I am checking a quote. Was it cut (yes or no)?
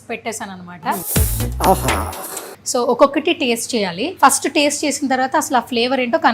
yes